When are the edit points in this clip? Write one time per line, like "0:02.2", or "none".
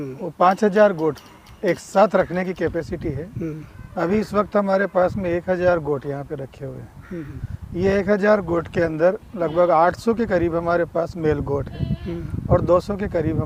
none